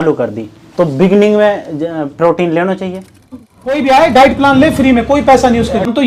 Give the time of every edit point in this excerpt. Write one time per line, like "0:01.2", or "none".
0:03.1